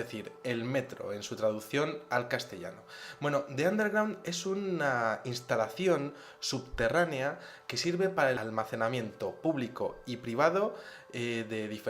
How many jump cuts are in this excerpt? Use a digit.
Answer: 1